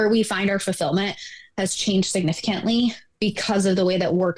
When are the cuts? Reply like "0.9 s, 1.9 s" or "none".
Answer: none